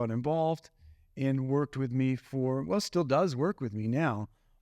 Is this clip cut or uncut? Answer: uncut